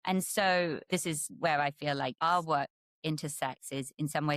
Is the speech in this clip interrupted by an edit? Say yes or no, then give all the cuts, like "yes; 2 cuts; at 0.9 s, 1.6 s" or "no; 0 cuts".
yes; 2 cuts; at 0.9 s, 2.2 s